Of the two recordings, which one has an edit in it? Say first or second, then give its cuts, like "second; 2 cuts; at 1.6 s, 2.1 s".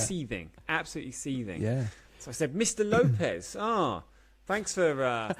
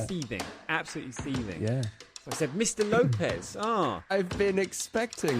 second; 1 cut; at 4.1 s